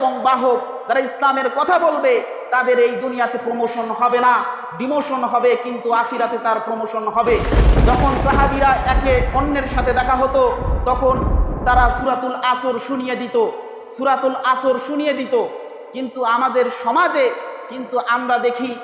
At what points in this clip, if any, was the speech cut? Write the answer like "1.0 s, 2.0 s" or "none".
7.6 s